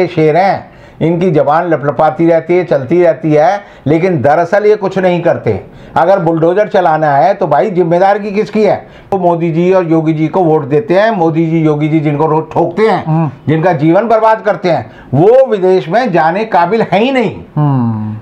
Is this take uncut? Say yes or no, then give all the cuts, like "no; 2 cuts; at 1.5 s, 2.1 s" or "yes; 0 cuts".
no; 1 cut; at 9.1 s